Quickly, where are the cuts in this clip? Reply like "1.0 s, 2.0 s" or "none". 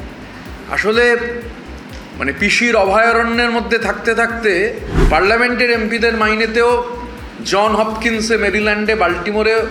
4.9 s